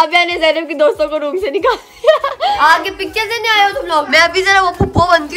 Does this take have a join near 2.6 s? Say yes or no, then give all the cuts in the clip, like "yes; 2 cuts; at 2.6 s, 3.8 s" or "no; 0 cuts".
yes; 2 cuts; at 2.6 s, 4.1 s